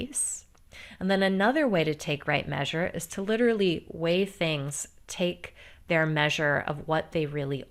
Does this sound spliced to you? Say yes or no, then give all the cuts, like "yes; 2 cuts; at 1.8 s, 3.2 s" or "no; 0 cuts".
no; 0 cuts